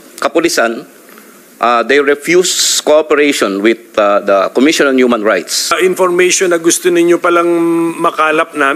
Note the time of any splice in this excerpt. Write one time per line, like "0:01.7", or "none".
0:05.7